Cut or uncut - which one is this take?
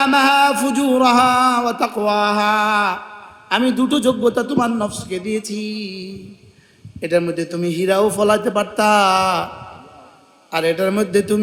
uncut